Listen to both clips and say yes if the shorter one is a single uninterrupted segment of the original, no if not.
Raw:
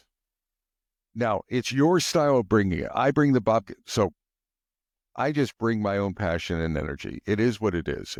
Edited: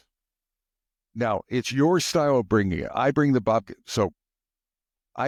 yes